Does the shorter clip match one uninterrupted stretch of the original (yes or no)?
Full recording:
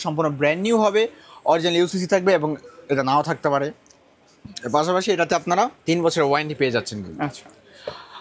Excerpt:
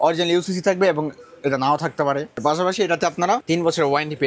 no